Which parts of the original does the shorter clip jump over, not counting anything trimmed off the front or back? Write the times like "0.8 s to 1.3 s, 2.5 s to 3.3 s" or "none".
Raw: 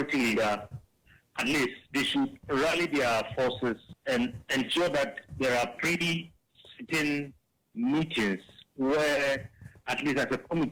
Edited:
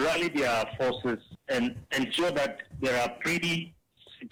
none

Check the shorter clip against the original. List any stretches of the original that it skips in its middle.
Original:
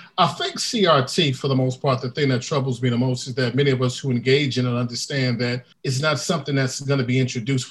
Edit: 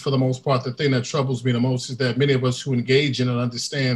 none

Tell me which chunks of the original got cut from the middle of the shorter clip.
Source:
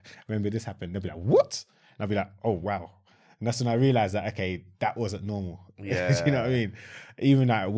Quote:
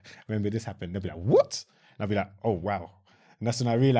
none

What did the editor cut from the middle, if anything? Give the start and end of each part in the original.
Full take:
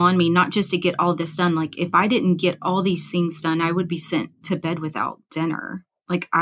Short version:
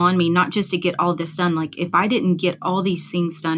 none

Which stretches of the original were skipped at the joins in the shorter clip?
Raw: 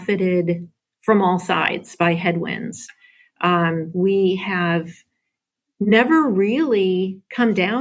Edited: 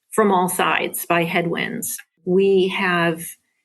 3.1 s to 3.9 s

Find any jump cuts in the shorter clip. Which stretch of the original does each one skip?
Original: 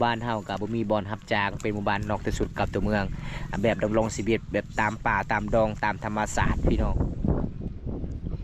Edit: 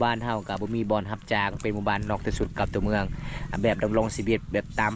none

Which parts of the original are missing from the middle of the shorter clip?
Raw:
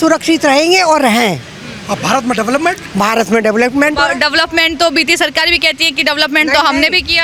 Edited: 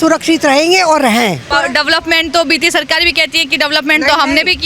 1.5 s to 4.0 s

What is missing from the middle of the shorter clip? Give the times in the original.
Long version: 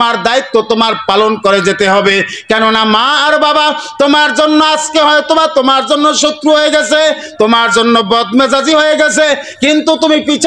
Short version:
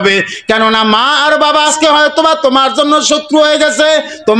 3.7 s to 4.9 s

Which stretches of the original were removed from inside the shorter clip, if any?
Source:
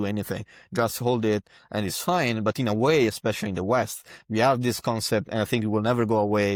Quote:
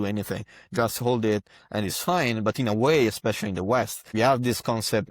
4.0 s to 4.2 s

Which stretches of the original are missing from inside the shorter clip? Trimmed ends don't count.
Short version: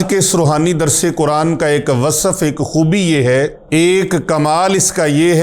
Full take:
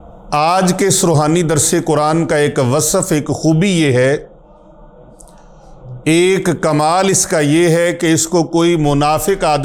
4.3 s to 5.9 s

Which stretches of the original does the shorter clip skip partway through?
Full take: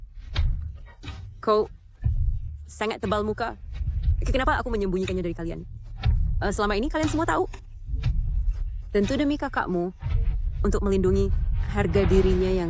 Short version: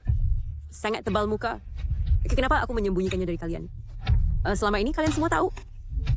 none

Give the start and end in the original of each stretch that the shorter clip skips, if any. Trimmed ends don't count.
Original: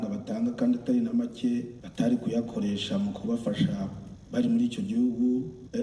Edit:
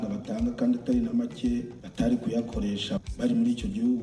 2.9 s to 4.1 s

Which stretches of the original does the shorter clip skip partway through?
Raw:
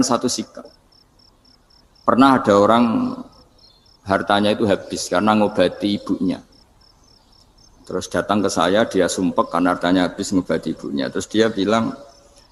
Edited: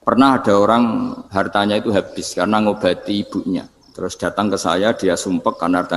3.2 s to 4.0 s, 6.5 s to 7.7 s

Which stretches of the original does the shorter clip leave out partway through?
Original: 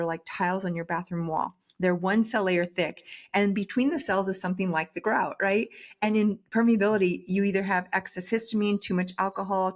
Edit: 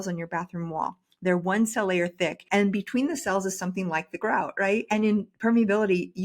3.0 s to 3.2 s, 5.7 s to 6.0 s

